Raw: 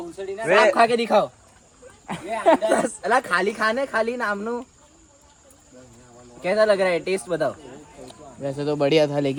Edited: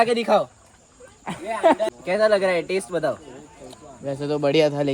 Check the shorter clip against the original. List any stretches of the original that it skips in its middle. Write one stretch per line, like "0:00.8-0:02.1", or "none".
0:02.7-0:06.2

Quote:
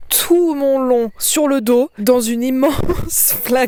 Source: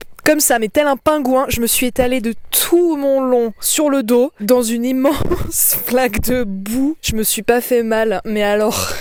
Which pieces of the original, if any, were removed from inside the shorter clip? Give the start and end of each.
none

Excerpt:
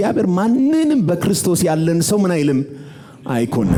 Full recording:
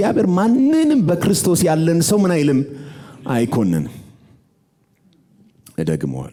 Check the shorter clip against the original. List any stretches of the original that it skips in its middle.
none

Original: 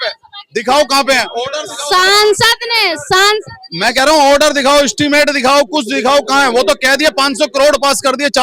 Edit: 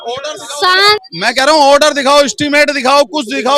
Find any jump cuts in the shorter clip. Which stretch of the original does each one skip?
0:02.2-0:03.5

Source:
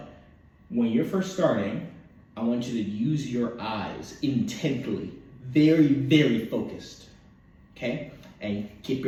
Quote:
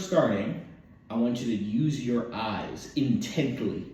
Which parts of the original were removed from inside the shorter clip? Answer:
none

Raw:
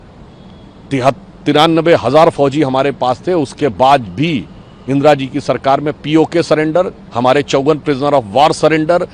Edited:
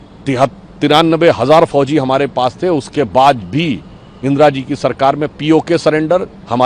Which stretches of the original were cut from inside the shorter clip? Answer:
none

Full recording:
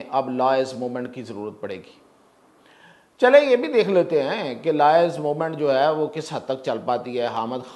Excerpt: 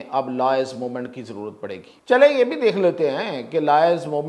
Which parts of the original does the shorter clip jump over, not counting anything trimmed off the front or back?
0:01.9-0:03.0

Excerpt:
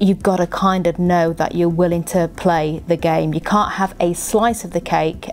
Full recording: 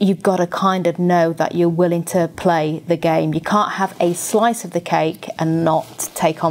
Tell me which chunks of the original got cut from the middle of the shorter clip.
none

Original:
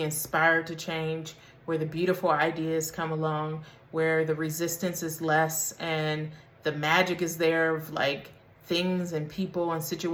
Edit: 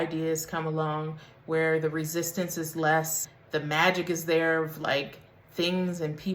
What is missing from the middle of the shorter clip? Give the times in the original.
0:05.7-0:06.4

